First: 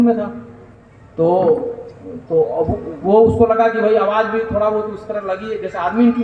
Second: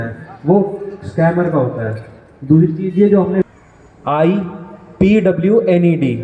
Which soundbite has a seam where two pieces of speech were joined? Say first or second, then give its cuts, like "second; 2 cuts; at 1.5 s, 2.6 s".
second; 1 cut; at 3.4 s